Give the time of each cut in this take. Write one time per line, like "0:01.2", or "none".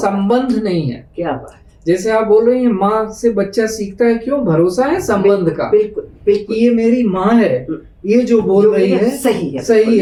none